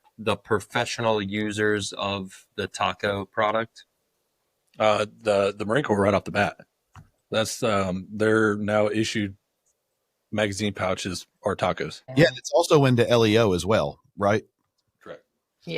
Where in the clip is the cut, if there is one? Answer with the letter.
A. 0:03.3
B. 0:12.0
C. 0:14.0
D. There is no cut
B